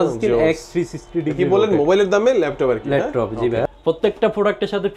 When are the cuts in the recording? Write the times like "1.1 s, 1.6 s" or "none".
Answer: 3.6 s